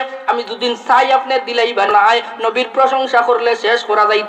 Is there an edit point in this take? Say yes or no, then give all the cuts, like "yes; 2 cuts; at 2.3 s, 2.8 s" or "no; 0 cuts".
yes; 1 cut; at 1.9 s